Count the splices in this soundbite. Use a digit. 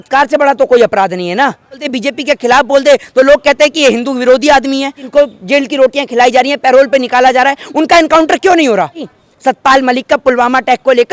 3